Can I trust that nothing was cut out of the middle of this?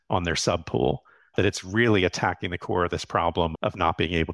no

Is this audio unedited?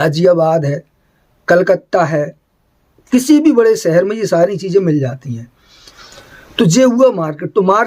no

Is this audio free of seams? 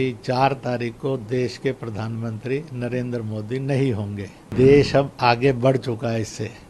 no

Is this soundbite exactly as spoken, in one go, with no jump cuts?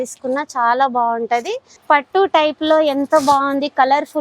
no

